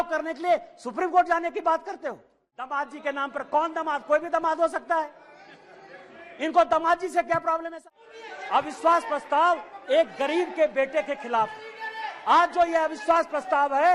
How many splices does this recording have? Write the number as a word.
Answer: two